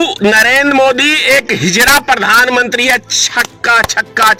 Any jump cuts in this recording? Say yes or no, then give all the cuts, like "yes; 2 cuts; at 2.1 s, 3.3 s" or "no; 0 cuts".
no; 0 cuts